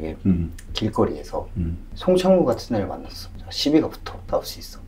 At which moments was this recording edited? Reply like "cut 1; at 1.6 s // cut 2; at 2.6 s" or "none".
none